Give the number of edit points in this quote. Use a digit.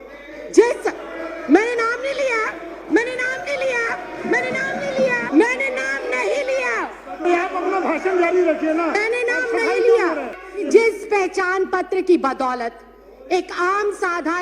2